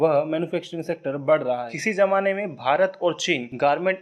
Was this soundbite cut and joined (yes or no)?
yes